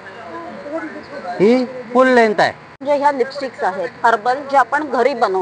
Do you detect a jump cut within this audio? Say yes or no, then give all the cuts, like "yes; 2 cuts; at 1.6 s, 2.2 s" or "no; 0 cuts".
yes; 1 cut; at 2.7 s